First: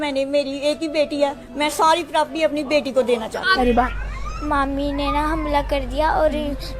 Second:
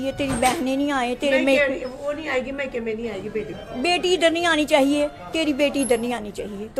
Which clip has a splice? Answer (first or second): first